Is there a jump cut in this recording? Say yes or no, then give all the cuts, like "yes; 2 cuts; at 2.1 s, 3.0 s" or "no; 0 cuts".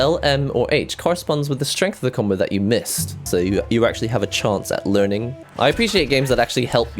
yes; 2 cuts; at 3.1 s, 5.4 s